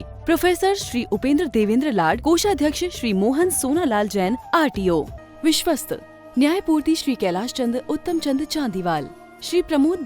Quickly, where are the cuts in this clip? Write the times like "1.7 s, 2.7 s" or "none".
5.2 s